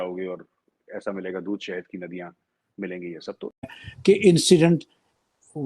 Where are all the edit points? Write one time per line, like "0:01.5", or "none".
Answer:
0:03.8